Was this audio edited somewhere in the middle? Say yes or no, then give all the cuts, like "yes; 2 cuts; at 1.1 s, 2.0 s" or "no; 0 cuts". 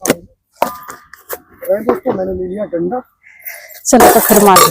yes; 1 cut; at 1.5 s